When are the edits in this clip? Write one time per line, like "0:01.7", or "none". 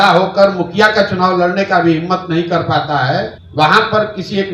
0:03.4